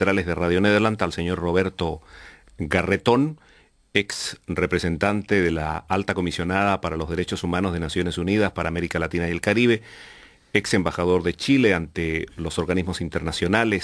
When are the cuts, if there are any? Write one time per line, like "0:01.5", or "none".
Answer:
none